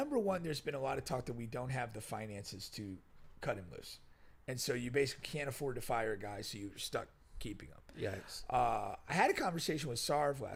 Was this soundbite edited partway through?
no; 0 cuts

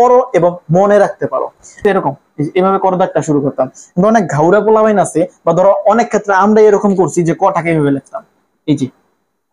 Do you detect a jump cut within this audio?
yes; 1 cut; at 1.8 s

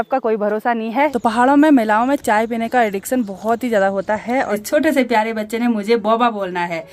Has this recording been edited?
yes; 2 cuts; at 1.1 s, 4.6 s

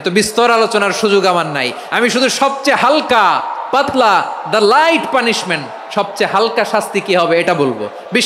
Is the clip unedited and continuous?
yes; 0 cuts

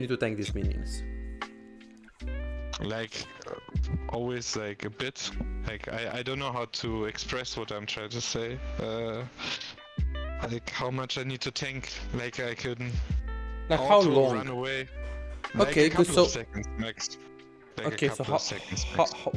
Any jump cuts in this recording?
no; 0 cuts

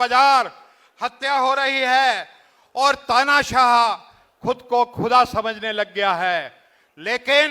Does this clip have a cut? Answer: no; 0 cuts

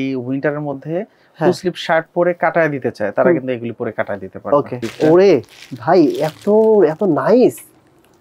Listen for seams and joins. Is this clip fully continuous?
no; 1 cut; at 4.9 s

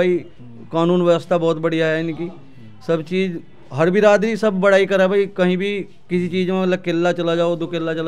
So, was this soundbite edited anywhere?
no; 0 cuts

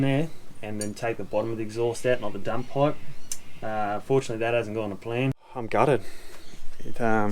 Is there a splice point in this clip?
yes; 1 cut; at 5.5 s

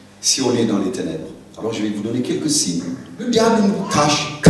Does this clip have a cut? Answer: yes; 1 cut; at 3.3 s

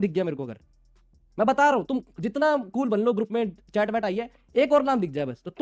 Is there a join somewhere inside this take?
no; 0 cuts

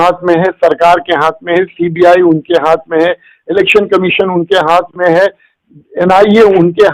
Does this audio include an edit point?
no; 0 cuts

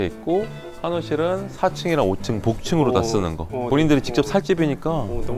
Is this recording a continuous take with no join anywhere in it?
no; 1 cut; at 3.7 s

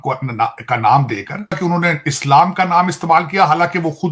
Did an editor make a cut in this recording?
yes; 1 cut; at 1.6 s

